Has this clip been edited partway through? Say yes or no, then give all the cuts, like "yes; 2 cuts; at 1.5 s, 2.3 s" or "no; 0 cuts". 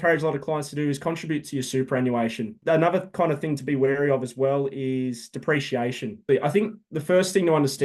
yes; 2 cuts; at 2.6 s, 6.3 s